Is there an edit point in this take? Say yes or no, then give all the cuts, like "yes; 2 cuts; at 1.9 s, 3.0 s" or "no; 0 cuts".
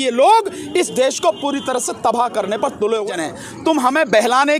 yes; 1 cut; at 3.1 s